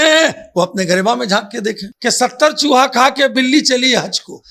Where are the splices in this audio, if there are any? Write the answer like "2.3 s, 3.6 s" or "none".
1.9 s